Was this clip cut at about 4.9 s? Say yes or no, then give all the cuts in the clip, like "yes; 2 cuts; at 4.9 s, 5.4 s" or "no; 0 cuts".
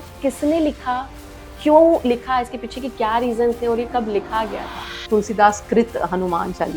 yes; 1 cut; at 4.9 s